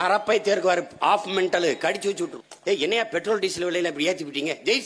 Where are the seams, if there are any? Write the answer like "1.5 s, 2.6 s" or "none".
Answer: 2.4 s